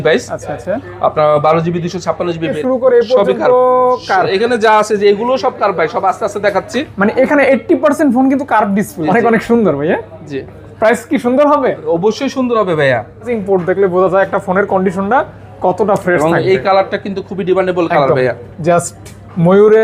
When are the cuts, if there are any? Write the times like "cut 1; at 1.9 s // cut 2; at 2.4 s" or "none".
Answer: cut 1; at 2.5 s // cut 2; at 9.0 s // cut 3; at 13.3 s